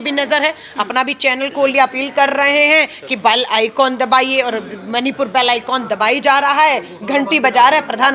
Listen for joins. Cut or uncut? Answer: uncut